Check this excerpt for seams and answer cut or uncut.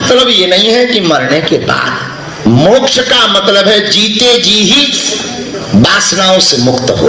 uncut